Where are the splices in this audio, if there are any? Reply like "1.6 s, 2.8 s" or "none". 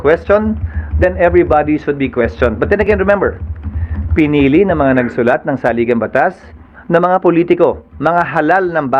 none